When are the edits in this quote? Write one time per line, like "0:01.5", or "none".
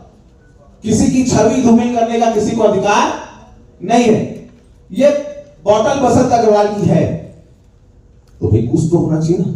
none